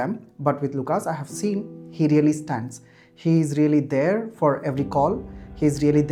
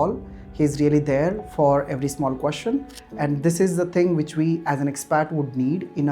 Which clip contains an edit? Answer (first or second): second